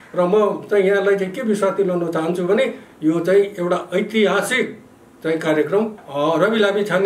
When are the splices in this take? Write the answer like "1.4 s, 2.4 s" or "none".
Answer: 6.0 s

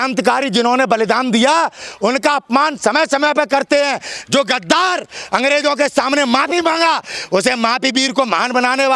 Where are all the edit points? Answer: none

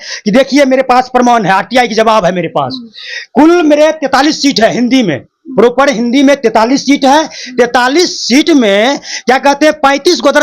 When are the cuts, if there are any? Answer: none

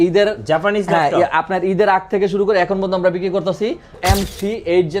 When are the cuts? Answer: 3.9 s

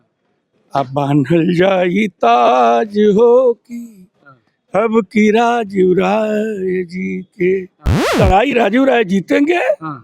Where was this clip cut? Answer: 8.2 s

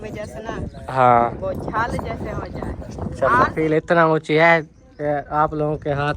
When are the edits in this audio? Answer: 3.5 s

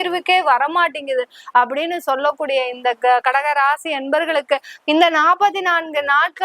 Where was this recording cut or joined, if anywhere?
none

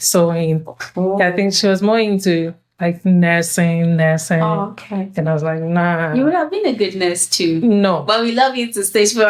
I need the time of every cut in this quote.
none

